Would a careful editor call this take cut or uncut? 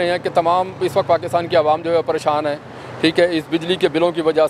uncut